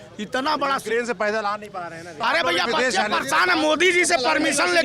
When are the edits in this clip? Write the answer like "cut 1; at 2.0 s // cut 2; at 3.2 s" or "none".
cut 1; at 2.2 s